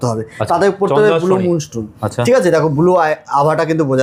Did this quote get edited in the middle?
no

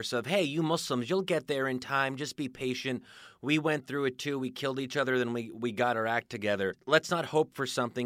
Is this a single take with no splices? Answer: no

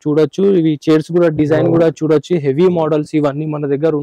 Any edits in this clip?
no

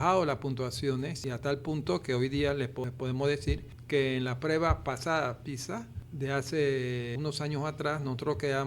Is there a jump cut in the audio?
yes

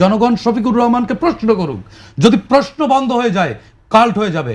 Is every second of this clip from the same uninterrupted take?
yes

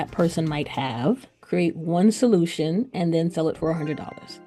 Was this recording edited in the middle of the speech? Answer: yes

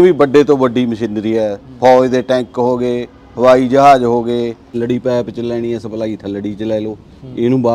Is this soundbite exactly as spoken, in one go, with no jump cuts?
no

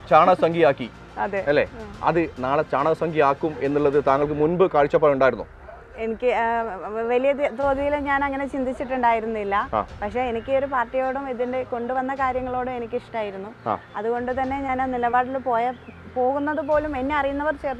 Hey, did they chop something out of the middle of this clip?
no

